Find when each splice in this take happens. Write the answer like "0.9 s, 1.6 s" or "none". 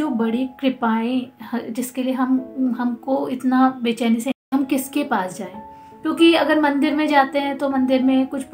4.4 s